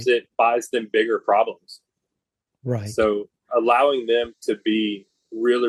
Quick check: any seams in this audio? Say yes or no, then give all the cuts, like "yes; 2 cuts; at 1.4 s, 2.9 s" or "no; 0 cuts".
no; 0 cuts